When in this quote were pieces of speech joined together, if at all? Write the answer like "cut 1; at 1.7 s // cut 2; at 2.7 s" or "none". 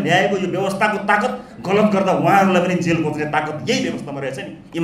none